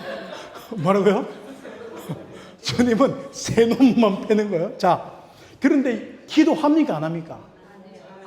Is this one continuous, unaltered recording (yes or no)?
no